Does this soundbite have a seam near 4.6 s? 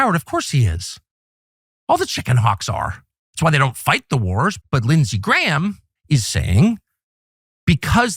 yes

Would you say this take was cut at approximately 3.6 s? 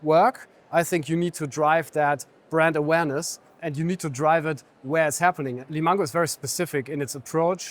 yes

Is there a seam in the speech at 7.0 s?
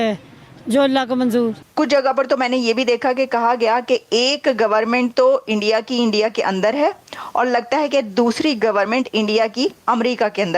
no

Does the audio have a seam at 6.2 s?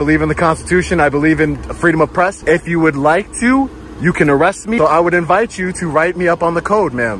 no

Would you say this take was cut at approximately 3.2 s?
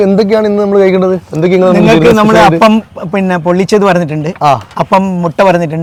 no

